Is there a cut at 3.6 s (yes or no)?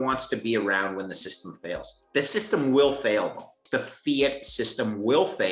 yes